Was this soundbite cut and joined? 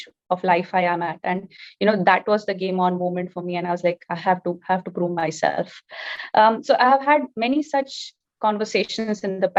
no; 0 cuts

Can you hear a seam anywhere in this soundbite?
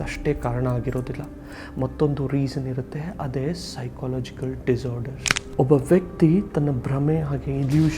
no; 0 cuts

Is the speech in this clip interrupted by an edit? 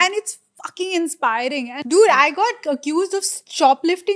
yes; 1 cut; at 1.7 s

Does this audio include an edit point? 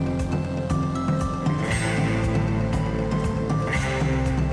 no; 0 cuts

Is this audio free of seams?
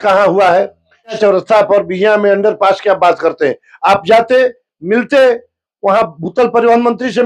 no; 1 cut; at 1.2 s

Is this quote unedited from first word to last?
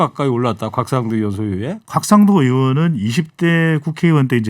no; 1 cut; at 1.8 s

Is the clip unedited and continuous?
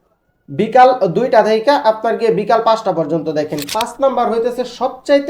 no; 1 cut; at 3.6 s

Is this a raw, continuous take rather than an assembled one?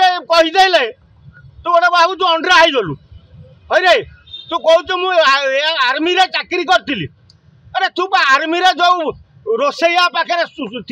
yes; 0 cuts

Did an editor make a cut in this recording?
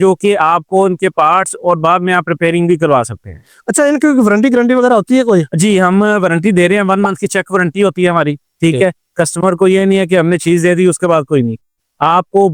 no; 0 cuts

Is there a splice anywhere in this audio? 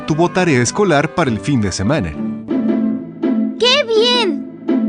no; 0 cuts

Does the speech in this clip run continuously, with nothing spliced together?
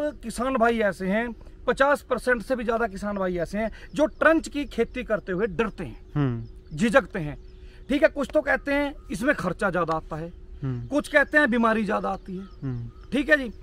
yes; 0 cuts

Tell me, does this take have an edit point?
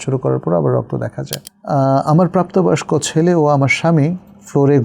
yes; 1 cut; at 1.5 s

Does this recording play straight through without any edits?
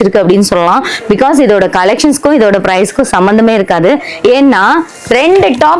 yes; 0 cuts

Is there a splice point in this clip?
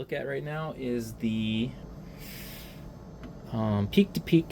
yes; 1 cut; at 1.8 s

